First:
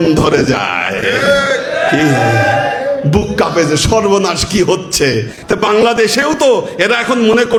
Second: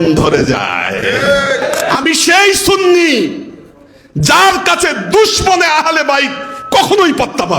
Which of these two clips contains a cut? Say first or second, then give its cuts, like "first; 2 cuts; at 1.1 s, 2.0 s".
second; 1 cut; at 1.9 s